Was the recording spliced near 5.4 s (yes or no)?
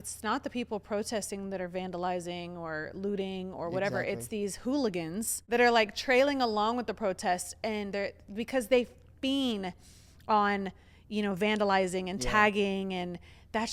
yes